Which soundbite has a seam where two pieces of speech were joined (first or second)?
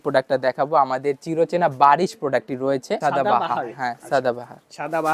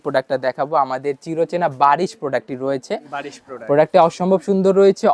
first